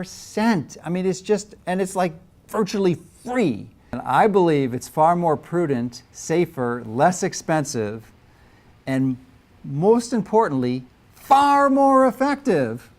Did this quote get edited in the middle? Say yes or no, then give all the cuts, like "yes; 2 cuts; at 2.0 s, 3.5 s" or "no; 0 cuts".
yes; 1 cut; at 4.0 s